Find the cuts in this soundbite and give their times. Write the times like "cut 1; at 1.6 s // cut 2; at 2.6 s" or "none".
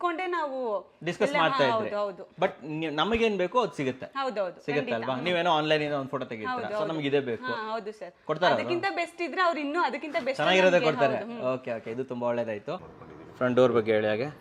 cut 1; at 12.9 s